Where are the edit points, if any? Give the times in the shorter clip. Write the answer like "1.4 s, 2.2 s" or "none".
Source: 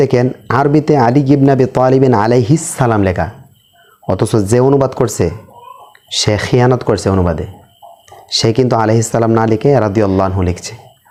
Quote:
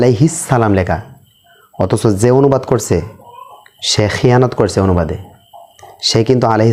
none